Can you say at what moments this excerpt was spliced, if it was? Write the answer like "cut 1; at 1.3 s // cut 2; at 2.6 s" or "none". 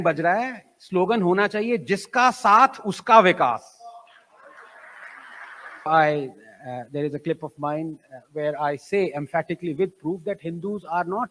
cut 1; at 5.9 s